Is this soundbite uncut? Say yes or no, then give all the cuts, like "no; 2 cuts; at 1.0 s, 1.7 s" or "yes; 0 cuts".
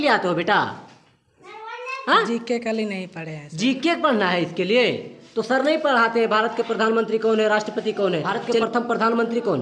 no; 1 cut; at 8.4 s